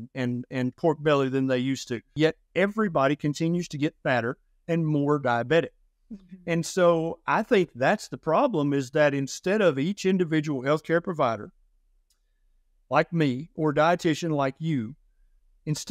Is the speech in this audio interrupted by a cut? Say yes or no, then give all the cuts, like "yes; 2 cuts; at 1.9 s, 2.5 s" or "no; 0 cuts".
yes; 1 cut; at 2.1 s